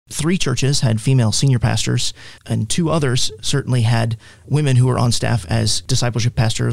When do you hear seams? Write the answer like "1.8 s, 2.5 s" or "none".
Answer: 5.8 s